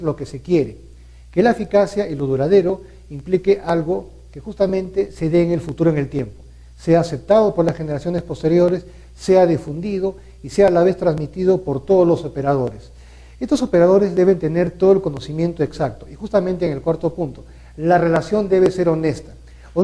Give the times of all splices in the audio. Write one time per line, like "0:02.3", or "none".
0:14.1